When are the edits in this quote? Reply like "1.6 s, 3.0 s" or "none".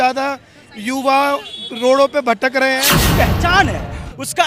3.0 s